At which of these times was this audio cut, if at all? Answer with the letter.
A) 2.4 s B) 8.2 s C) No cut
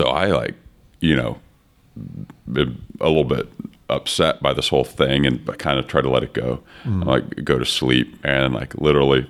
B